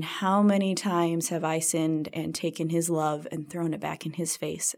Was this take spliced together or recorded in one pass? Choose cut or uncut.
uncut